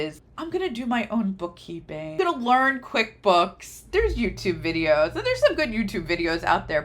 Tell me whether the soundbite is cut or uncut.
cut